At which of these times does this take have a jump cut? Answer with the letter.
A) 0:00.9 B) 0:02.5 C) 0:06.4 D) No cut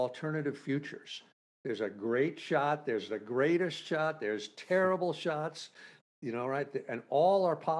D